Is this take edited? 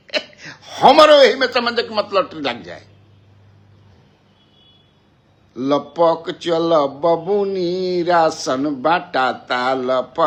no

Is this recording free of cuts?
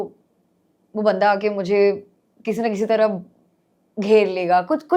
yes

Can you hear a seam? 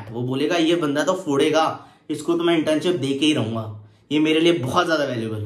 no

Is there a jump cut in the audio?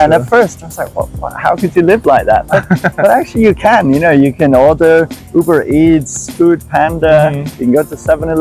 no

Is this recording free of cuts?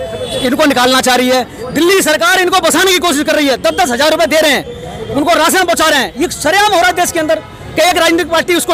yes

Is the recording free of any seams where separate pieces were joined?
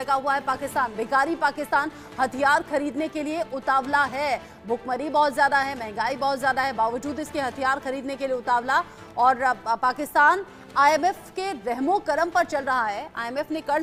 yes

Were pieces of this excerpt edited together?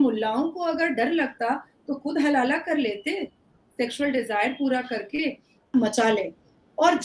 yes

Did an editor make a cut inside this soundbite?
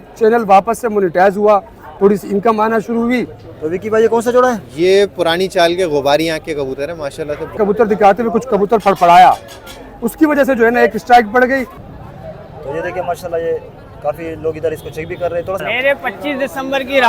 yes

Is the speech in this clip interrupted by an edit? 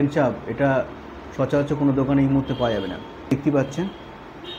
yes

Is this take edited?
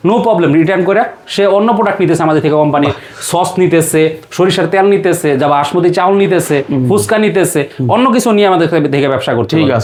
no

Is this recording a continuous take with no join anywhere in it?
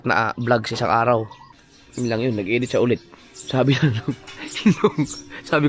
no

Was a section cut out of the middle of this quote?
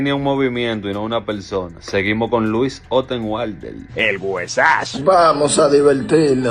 no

